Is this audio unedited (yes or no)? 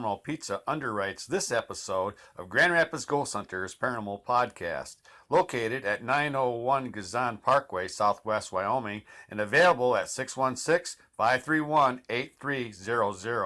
yes